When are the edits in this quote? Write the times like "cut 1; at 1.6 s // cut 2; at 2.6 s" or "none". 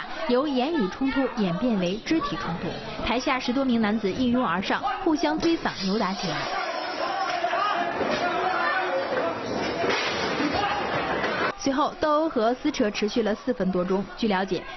cut 1; at 9.4 s

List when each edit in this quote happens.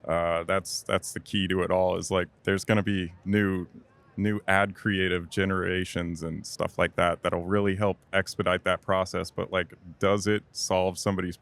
cut 1; at 2.3 s

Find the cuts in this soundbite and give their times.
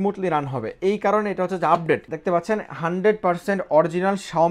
cut 1; at 2.1 s

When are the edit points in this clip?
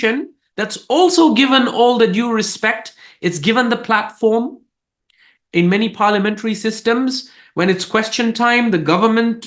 none

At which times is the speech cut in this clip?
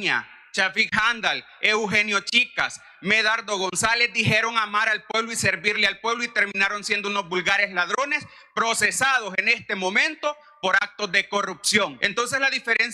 cut 1; at 12.0 s

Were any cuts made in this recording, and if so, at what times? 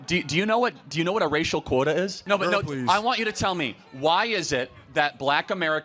cut 1; at 2.2 s

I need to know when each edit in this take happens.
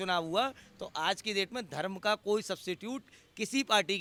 none

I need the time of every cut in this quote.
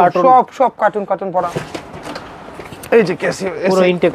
cut 1; at 1.5 s

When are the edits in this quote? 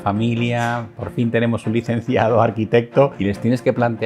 cut 1; at 3.2 s

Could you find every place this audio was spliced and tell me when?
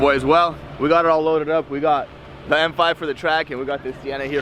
none

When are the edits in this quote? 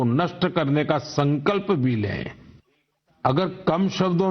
cut 1; at 3.4 s

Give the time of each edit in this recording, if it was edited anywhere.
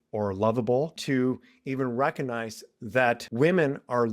cut 1; at 1.0 s // cut 2; at 3.3 s

